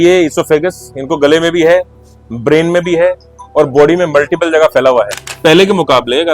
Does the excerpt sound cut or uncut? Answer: cut